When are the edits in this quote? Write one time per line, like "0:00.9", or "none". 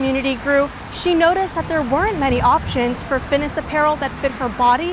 none